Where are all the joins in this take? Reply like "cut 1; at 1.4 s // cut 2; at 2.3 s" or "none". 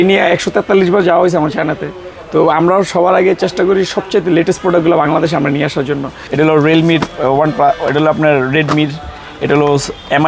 cut 1; at 6.2 s